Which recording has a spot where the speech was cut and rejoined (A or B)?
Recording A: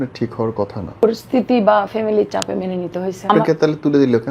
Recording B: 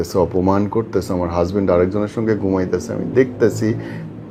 A